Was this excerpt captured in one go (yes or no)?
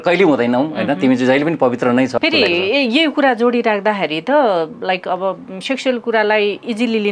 no